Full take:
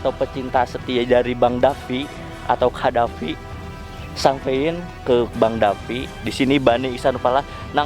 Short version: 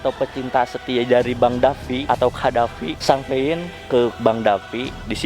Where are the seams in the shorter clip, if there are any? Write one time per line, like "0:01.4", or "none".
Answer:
0:02.0
0:02.9